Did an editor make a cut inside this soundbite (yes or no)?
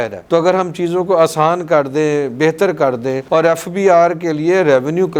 yes